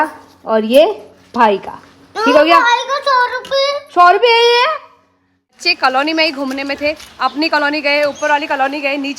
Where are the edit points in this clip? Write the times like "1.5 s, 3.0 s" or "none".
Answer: 5.7 s